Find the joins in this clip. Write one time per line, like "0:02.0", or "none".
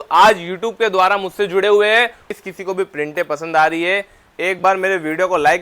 0:02.2